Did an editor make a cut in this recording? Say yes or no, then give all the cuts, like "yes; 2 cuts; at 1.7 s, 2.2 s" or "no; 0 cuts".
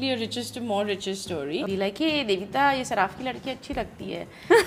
yes; 1 cut; at 1.6 s